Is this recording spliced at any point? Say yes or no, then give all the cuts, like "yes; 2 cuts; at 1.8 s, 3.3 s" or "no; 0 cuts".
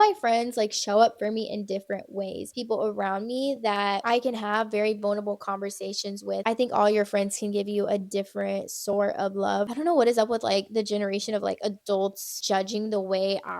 yes; 4 cuts; at 2.5 s, 6.4 s, 9.7 s, 12.3 s